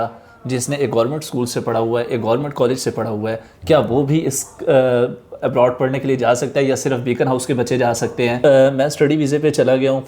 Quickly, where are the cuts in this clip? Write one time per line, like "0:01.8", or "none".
0:08.4